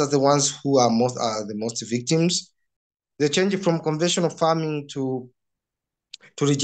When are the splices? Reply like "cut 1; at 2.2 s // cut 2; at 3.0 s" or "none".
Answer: cut 1; at 2.7 s